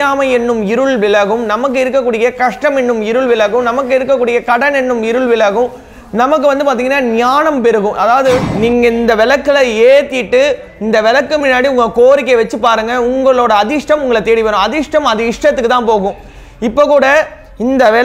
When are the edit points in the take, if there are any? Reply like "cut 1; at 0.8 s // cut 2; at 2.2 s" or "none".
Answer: cut 1; at 8.5 s